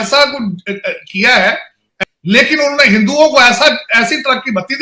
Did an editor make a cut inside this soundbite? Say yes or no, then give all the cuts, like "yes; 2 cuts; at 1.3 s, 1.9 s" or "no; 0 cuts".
yes; 1 cut; at 1.8 s